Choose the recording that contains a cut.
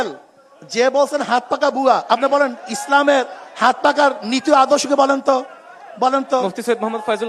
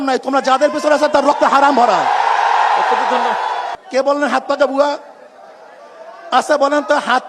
second; 1 cut; at 3.7 s

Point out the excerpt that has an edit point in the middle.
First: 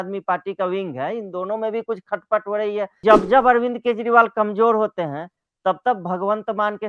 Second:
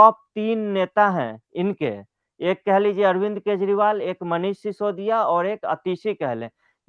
first; 1 cut; at 3.0 s

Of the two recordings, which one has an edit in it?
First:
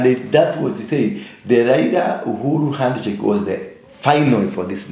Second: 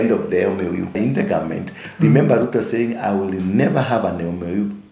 second; 1 cut; at 1.0 s

